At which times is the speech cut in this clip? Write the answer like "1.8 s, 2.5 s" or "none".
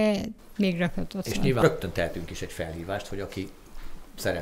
1.6 s